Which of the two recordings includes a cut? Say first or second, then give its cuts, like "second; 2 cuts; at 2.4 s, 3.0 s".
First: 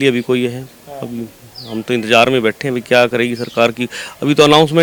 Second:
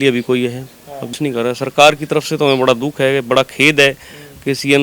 second; 1 cut; at 1.1 s